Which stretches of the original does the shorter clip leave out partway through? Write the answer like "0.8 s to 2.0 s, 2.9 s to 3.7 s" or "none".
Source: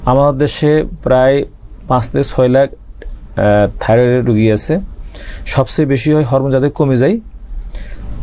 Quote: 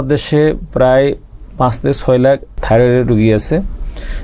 2.9 s to 3.8 s